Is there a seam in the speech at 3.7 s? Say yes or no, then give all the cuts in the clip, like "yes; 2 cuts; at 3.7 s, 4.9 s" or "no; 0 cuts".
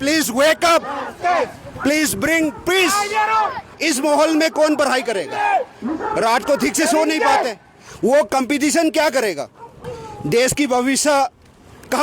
yes; 1 cut; at 3.7 s